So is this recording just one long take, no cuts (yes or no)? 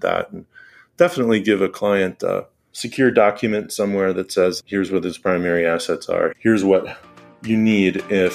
yes